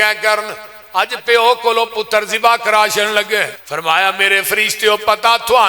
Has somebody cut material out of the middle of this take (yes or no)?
yes